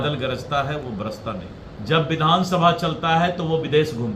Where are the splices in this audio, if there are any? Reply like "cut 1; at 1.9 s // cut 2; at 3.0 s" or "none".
cut 1; at 1.7 s